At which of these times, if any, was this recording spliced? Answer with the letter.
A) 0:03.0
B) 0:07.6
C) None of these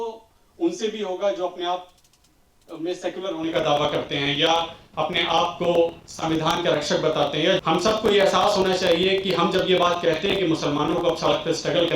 B